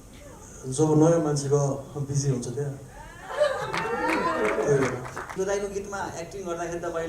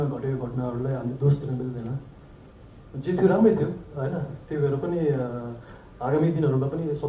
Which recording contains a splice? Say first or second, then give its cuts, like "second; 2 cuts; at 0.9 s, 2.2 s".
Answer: first; 1 cut; at 5.3 s